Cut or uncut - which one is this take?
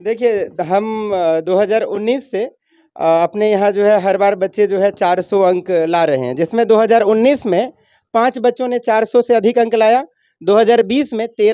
uncut